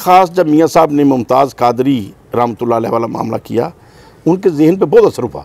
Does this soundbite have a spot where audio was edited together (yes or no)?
no